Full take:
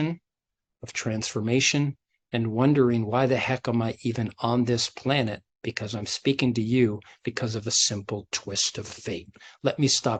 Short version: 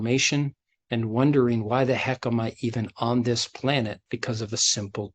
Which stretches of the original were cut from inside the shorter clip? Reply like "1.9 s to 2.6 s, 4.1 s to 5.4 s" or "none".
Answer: 5.5 s to 7.2 s